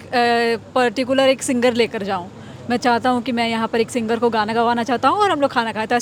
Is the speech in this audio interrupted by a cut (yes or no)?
no